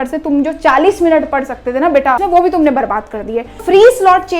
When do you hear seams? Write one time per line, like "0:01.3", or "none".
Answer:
0:02.2
0:03.6